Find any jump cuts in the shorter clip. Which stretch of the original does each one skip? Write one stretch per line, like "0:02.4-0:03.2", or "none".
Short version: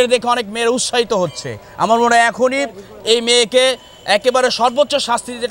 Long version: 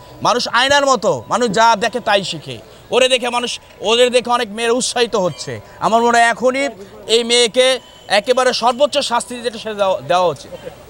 none